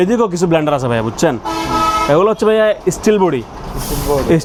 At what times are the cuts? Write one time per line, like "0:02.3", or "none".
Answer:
none